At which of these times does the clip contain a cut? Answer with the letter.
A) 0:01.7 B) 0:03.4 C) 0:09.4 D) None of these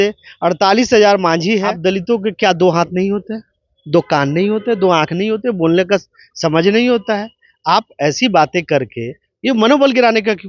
A